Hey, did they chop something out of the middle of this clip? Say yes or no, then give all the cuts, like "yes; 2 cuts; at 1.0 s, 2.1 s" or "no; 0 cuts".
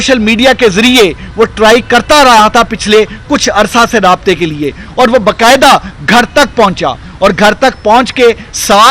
no; 0 cuts